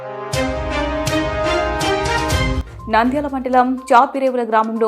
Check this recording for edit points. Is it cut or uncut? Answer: cut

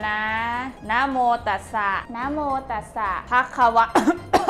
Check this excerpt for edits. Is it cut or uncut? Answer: uncut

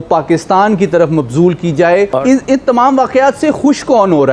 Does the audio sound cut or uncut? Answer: cut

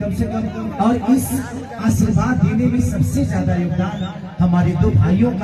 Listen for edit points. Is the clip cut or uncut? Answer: uncut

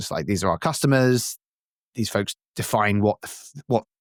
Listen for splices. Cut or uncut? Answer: uncut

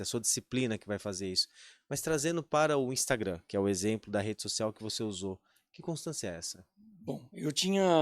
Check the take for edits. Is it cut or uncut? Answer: uncut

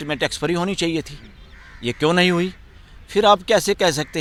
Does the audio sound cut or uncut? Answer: uncut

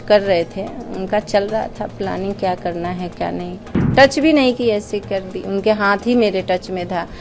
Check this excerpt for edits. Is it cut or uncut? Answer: cut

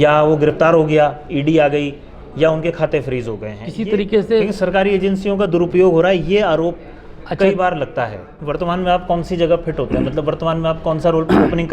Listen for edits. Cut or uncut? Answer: cut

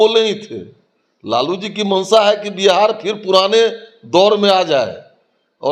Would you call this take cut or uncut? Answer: uncut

